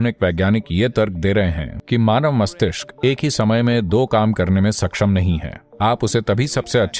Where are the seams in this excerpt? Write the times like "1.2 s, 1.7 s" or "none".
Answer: 1.7 s